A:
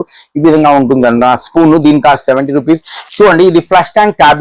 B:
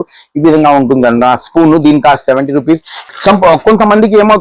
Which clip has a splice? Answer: A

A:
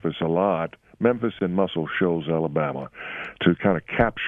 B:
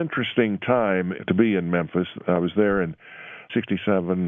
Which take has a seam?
B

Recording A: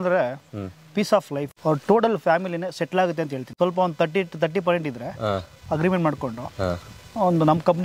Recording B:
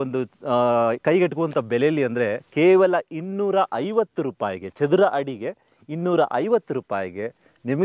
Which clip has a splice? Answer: A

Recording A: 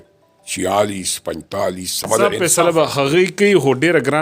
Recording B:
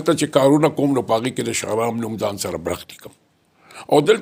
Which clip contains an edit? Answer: A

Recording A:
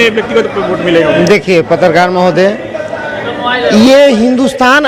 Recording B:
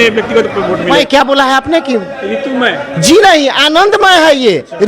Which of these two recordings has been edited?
B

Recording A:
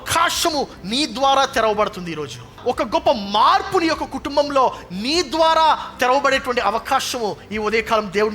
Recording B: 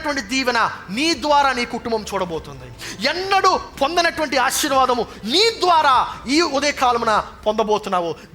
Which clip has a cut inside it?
A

